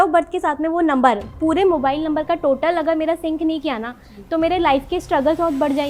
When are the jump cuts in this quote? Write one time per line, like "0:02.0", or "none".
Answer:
none